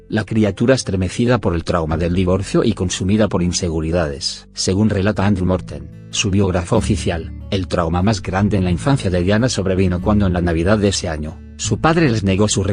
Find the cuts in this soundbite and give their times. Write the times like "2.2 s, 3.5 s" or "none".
8.4 s